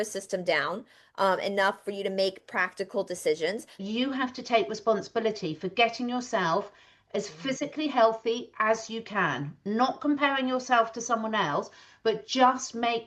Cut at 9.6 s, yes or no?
no